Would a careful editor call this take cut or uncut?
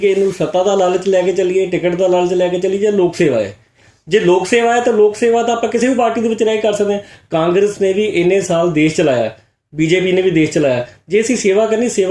uncut